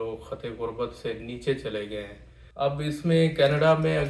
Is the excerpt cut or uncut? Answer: cut